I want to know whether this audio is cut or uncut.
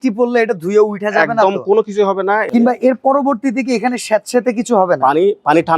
cut